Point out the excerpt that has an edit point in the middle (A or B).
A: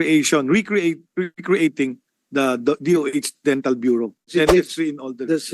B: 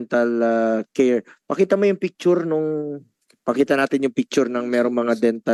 A